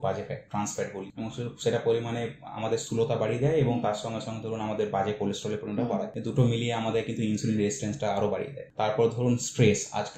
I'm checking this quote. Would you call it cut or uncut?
cut